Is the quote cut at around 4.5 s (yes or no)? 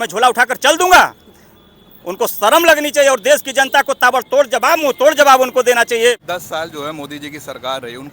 no